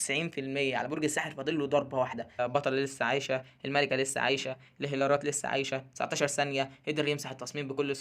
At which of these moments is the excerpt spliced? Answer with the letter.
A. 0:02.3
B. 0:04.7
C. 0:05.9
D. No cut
A